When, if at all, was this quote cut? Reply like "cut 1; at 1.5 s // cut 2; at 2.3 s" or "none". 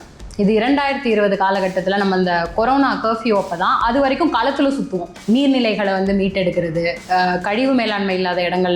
cut 1; at 5.1 s